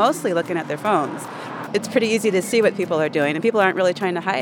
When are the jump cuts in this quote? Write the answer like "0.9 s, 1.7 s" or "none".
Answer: 1.6 s